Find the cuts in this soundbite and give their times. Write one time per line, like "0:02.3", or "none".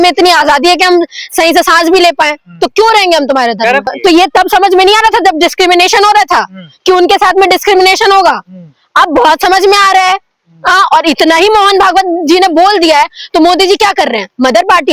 0:03.8